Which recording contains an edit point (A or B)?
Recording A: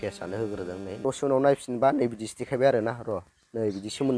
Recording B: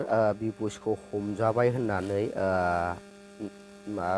A